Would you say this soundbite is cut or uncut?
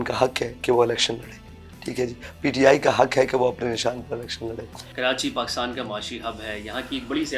uncut